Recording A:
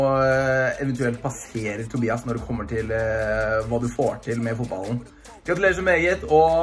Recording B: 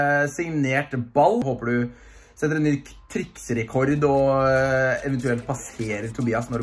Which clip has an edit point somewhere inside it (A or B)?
B